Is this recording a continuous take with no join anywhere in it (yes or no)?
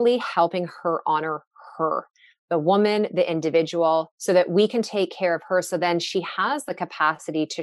no